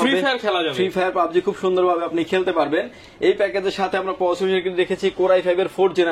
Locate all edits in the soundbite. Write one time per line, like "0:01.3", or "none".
none

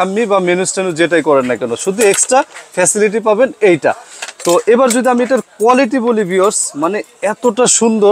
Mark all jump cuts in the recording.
none

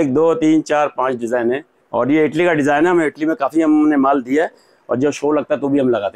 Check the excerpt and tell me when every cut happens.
0:01.8

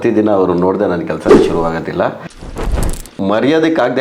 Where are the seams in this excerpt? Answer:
0:02.8

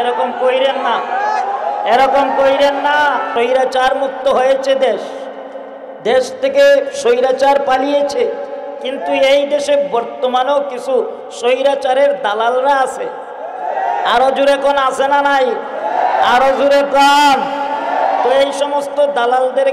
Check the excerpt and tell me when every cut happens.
0:03.3

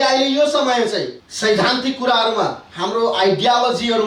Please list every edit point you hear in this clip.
0:01.2

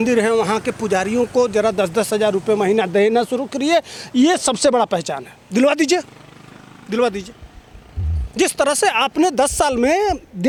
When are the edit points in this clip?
none

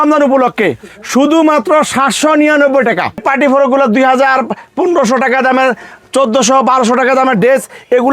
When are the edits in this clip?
0:03.2

